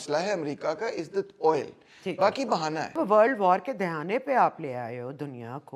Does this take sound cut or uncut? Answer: cut